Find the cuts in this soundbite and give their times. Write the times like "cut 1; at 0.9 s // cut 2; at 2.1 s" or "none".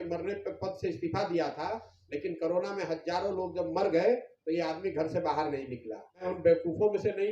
cut 1; at 6.2 s